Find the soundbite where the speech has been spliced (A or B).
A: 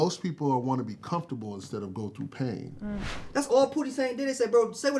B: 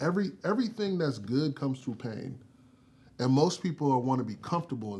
A